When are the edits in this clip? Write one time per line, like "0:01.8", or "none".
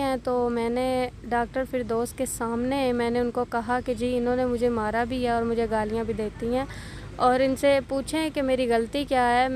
none